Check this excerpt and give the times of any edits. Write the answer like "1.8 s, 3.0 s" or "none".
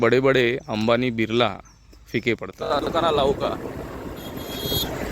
2.8 s